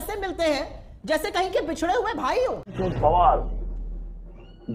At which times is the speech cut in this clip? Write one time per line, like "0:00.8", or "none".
none